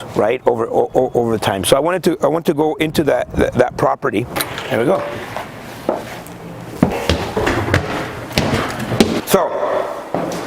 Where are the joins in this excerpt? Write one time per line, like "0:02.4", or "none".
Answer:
0:04.4